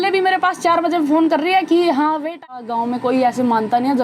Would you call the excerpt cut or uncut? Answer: cut